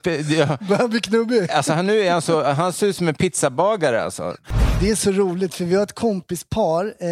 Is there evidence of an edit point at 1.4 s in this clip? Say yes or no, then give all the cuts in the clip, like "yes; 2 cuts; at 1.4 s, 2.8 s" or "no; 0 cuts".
no; 1 cut; at 4.4 s